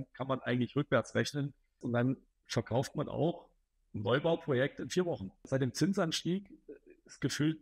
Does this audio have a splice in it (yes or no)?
yes